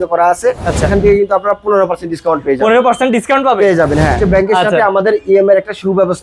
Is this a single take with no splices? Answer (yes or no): no